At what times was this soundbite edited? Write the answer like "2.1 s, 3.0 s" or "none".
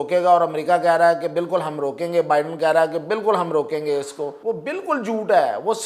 4.4 s

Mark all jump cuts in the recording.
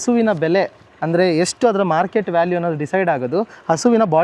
none

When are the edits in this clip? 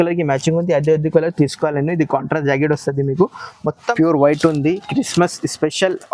3.9 s

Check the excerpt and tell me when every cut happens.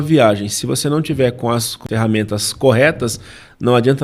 1.8 s

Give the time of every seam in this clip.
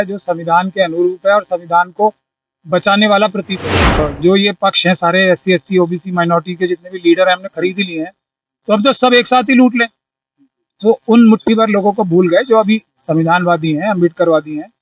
4.0 s

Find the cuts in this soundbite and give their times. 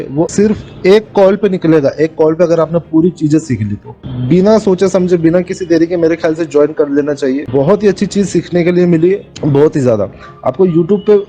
none

